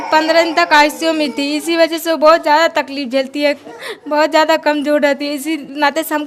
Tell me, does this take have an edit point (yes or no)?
no